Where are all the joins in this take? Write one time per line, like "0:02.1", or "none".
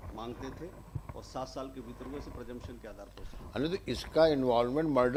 none